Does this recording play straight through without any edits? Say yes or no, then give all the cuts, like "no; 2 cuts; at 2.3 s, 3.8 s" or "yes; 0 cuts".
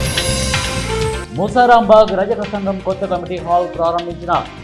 no; 1 cut; at 1.2 s